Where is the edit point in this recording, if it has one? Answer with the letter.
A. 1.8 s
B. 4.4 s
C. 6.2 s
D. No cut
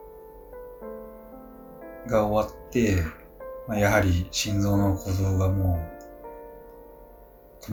D